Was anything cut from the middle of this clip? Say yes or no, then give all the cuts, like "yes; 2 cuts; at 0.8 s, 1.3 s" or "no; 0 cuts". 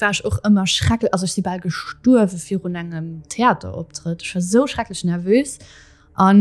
no; 0 cuts